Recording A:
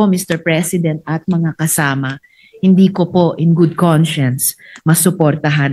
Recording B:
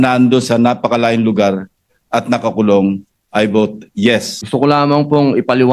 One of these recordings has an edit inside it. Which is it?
B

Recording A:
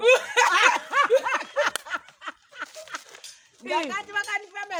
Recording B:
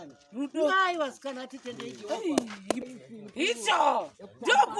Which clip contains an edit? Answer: B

